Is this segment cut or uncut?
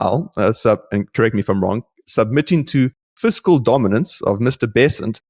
uncut